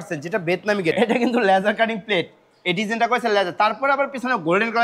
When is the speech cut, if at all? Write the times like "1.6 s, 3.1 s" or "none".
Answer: 0.9 s